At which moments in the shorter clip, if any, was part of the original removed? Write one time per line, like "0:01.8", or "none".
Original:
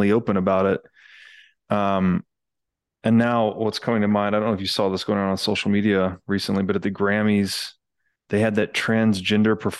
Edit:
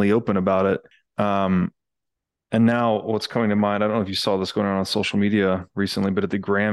0:01.0